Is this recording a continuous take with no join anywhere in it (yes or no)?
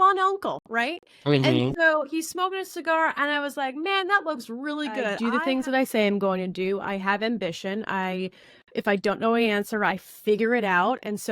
no